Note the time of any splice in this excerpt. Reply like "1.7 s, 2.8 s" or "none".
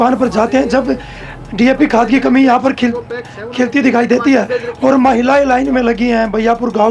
none